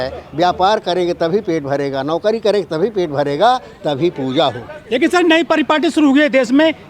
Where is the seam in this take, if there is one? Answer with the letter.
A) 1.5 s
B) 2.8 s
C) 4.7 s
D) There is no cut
D